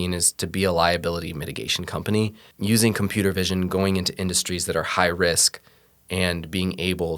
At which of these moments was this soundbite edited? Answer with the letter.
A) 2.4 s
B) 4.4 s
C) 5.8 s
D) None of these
A